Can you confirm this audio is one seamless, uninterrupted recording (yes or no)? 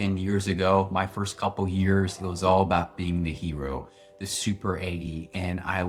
yes